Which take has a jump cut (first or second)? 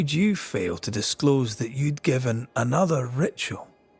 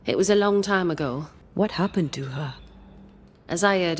second